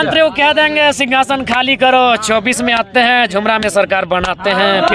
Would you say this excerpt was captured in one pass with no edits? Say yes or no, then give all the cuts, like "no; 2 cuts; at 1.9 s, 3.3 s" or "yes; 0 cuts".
yes; 0 cuts